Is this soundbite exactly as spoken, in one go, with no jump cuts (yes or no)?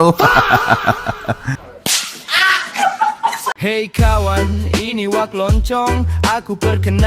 no